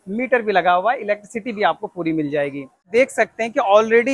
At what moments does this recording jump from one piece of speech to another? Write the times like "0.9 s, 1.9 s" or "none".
2.9 s